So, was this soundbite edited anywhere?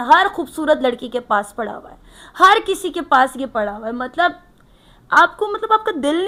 no; 0 cuts

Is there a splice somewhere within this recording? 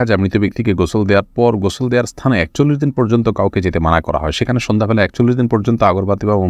no; 0 cuts

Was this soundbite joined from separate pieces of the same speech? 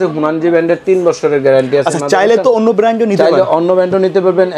no; 0 cuts

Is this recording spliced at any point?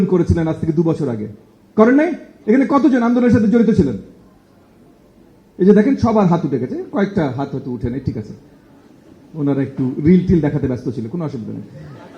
no; 0 cuts

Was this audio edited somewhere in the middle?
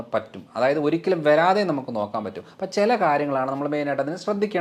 no; 0 cuts

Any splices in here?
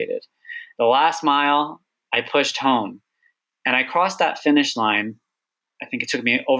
no; 0 cuts

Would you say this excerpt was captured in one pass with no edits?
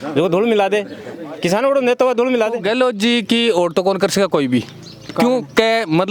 no; 1 cut; at 2.6 s

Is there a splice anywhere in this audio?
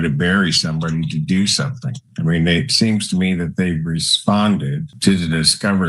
yes; 1 cut; at 4.9 s

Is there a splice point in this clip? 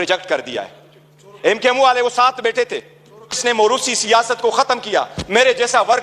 yes; 1 cut; at 3.4 s

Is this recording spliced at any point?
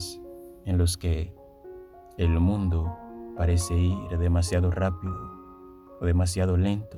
no; 0 cuts

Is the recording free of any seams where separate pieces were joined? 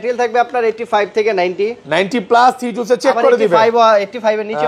yes; 0 cuts

